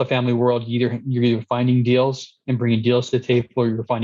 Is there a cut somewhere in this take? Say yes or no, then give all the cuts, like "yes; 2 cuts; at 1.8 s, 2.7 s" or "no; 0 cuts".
no; 0 cuts